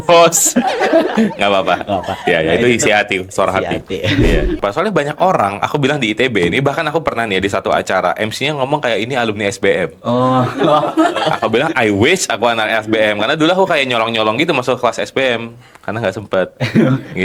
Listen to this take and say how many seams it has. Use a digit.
1